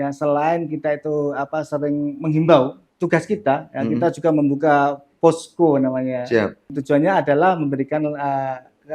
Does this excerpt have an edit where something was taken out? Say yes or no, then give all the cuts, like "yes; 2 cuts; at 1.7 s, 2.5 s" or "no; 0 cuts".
yes; 2 cuts; at 2.8 s, 6.8 s